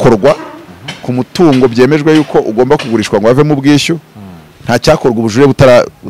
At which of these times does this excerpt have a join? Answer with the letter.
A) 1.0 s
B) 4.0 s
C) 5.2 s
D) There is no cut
D